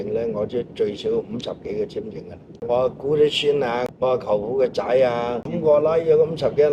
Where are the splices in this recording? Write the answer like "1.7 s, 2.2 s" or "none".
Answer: 2.6 s, 3.8 s, 5.5 s